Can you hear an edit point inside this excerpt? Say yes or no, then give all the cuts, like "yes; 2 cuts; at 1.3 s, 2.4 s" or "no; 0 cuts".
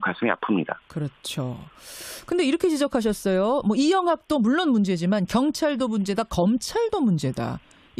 yes; 1 cut; at 3.4 s